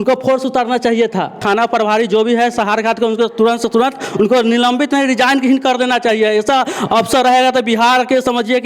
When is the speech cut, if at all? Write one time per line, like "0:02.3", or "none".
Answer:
0:01.4